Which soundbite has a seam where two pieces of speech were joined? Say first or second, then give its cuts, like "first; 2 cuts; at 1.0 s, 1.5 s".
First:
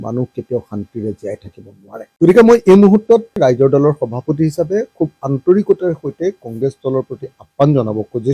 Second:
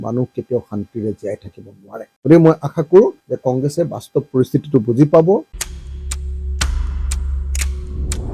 first; 2 cuts; at 2.1 s, 3.3 s